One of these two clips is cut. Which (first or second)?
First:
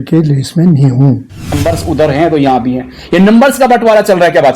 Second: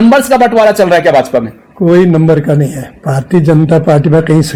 first